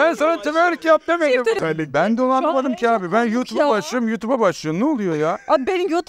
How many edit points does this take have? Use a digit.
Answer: 1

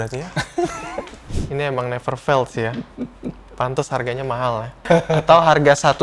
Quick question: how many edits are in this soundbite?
2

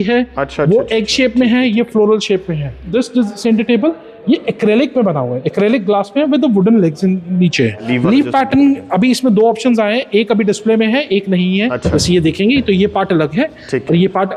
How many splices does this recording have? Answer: 3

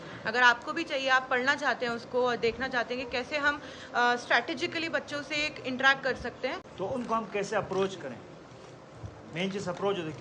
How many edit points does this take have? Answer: 1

